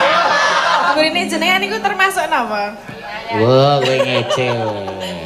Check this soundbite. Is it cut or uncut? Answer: cut